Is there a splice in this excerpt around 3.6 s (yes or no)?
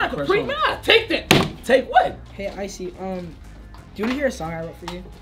no